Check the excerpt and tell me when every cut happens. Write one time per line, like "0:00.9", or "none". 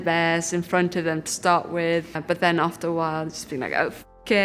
0:02.1